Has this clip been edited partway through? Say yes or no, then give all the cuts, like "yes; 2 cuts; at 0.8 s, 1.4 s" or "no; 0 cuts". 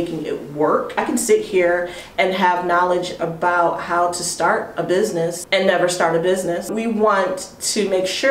yes; 3 cuts; at 1.0 s, 5.4 s, 6.7 s